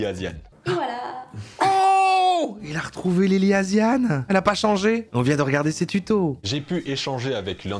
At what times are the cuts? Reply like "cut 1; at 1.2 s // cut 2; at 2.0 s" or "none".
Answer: cut 1; at 4.2 s // cut 2; at 5.1 s // cut 3; at 6.4 s